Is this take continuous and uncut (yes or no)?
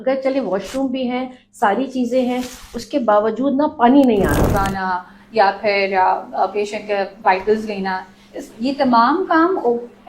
no